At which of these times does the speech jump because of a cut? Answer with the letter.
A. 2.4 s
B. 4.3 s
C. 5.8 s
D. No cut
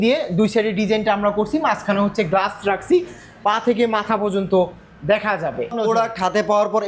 C